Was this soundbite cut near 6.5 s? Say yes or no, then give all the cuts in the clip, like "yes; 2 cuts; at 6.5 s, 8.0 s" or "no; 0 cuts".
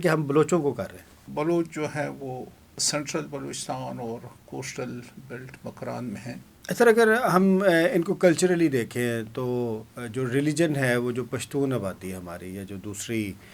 yes; 2 cuts; at 1.1 s, 6.5 s